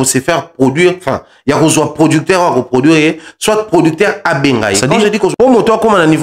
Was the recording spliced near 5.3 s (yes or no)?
yes